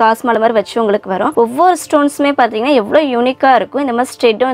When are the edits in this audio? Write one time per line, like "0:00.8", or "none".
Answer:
0:01.3